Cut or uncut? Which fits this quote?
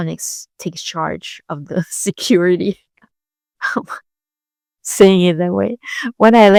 uncut